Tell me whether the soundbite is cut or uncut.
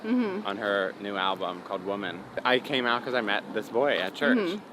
cut